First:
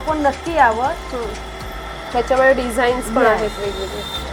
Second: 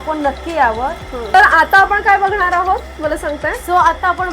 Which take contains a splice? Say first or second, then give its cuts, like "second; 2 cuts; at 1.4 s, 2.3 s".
second; 1 cut; at 1.1 s